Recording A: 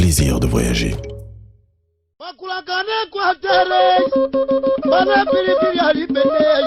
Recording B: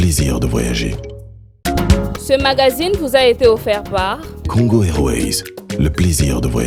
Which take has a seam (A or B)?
A